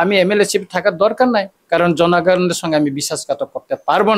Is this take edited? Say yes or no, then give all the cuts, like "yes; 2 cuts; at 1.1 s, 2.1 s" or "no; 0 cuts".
no; 0 cuts